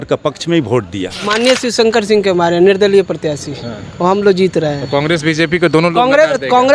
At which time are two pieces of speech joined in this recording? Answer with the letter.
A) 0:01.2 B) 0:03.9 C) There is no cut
A